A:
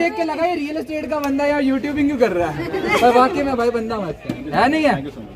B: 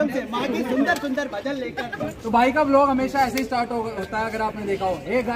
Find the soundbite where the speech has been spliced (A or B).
B